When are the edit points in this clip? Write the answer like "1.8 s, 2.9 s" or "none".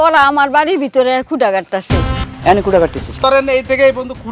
2.2 s, 3.2 s

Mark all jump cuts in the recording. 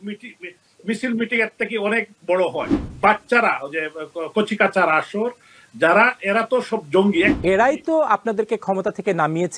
2.8 s, 7.3 s

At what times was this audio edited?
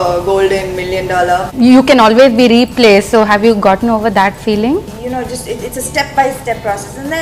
1.5 s, 4.9 s

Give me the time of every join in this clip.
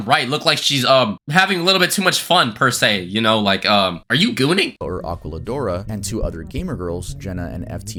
none

